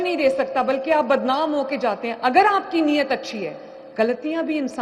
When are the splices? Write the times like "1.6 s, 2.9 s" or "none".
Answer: none